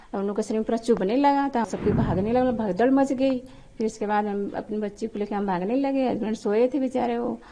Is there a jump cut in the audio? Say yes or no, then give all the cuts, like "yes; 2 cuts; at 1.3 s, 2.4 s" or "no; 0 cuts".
yes; 1 cut; at 1.7 s